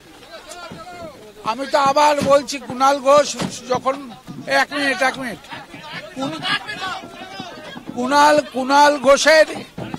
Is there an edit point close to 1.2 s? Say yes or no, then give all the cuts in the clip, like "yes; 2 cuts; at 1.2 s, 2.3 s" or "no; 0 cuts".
no; 0 cuts